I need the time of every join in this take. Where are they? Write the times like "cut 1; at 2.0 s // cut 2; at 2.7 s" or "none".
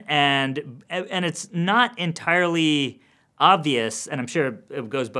none

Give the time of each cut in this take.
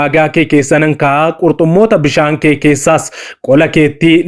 none

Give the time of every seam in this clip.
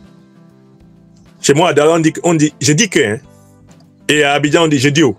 cut 1; at 1.4 s

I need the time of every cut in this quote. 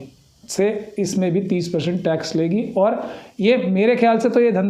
none

